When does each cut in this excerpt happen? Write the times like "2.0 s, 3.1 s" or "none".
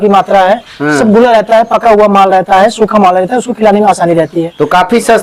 none